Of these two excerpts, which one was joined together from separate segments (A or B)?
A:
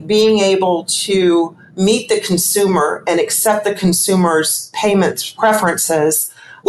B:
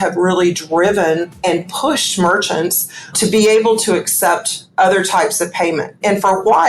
A